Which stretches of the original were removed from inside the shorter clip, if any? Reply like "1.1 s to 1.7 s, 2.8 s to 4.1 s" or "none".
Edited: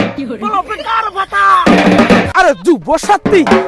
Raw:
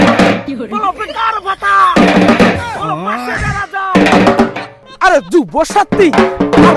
2.6 s to 5.0 s